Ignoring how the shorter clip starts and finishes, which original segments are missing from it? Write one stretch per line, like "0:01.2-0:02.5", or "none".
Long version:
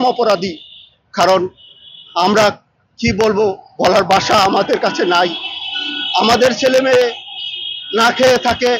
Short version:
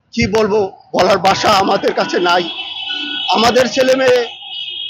none